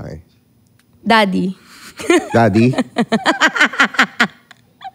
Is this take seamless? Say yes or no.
yes